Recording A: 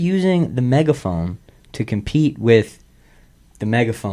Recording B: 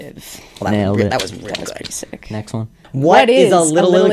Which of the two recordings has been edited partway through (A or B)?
B